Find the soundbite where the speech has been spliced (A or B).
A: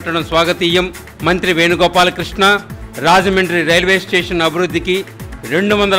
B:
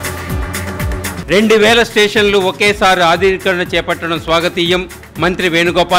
B